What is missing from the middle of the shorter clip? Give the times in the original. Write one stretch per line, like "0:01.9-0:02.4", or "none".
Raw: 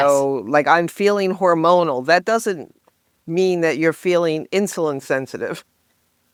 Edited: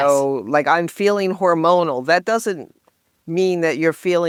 none